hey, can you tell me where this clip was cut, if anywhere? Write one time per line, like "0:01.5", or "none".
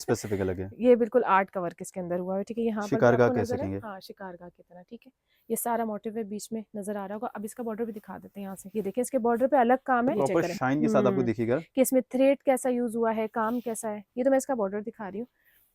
0:10.3